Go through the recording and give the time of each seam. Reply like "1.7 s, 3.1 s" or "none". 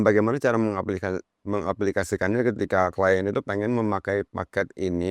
none

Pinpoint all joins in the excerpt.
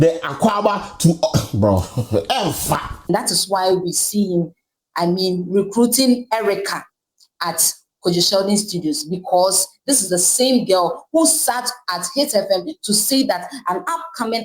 3.1 s

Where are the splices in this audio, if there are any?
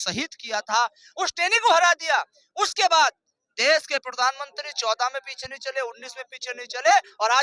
none

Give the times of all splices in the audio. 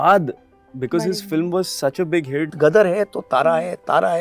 2.5 s

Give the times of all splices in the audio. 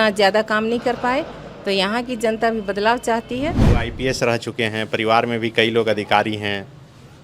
3.6 s

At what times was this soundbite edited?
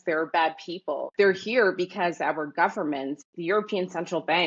1.1 s, 3.3 s

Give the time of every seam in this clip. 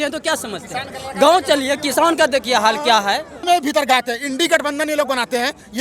3.5 s

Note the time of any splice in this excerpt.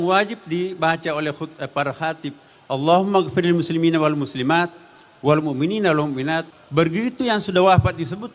6.6 s

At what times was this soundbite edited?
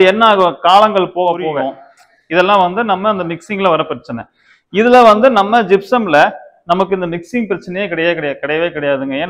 1.6 s

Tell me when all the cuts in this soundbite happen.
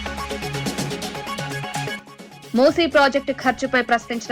1.9 s

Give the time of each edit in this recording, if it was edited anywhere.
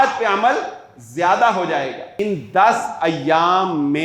2.2 s

